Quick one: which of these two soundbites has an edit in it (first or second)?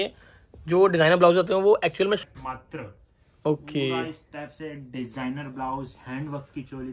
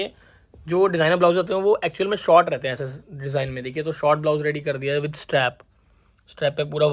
first